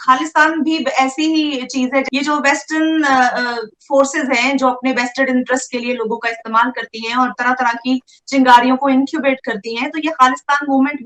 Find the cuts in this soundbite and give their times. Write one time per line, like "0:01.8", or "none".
none